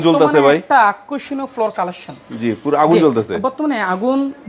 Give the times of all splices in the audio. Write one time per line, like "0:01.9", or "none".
none